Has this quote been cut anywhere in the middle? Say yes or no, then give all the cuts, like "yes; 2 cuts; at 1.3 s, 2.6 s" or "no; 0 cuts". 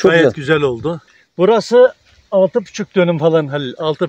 yes; 1 cut; at 1.0 s